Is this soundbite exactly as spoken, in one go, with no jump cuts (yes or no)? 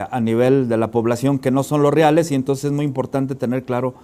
yes